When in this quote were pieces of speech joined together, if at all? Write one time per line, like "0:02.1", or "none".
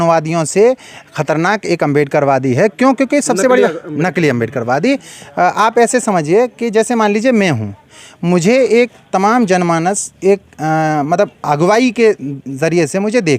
none